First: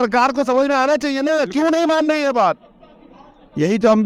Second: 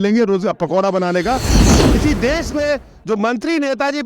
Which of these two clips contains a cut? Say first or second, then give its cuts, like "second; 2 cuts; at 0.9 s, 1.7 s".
second; 1 cut; at 1.6 s